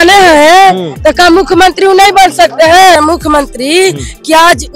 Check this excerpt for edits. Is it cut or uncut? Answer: cut